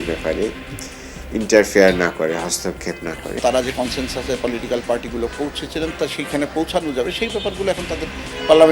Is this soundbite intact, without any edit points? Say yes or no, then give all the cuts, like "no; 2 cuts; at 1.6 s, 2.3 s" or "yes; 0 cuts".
no; 1 cut; at 3.4 s